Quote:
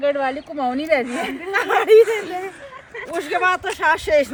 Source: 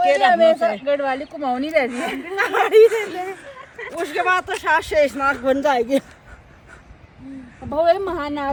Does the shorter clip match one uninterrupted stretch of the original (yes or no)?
yes